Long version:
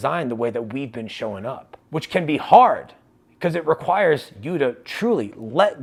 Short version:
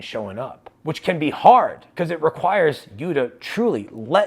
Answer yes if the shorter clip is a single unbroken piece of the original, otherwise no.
no